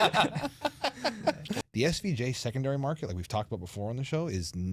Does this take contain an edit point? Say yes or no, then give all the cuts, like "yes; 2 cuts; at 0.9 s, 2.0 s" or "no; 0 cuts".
yes; 1 cut; at 1.6 s